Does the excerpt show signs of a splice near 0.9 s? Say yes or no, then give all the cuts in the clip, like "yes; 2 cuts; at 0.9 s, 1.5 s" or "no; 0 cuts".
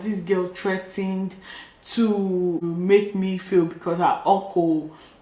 no; 1 cut; at 2.7 s